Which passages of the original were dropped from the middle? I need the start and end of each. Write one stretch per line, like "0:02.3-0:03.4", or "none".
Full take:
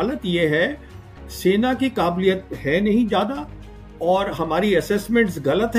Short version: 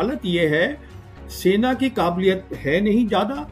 none